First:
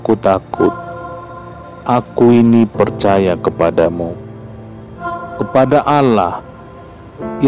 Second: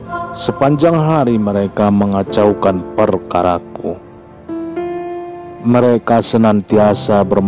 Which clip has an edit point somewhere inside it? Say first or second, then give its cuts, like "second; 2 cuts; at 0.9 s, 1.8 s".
second; 2 cuts; at 3.8 s, 5.6 s